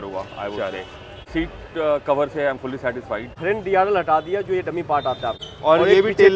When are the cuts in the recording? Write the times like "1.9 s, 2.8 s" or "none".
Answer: 1.3 s, 3.3 s, 5.3 s